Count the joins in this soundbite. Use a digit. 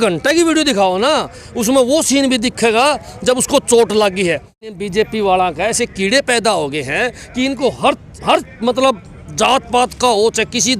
1